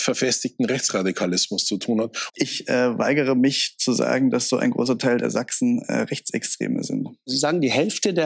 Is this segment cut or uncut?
cut